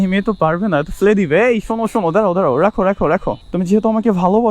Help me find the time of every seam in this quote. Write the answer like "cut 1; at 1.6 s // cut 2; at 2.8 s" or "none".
cut 1; at 3.4 s